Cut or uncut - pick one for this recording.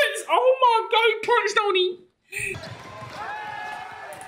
cut